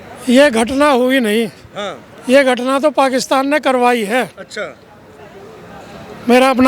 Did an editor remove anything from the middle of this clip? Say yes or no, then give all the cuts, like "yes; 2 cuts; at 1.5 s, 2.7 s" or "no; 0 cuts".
no; 0 cuts